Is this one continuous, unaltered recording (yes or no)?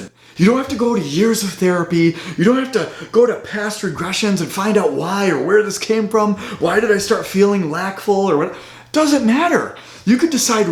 yes